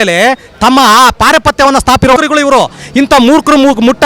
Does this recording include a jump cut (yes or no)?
yes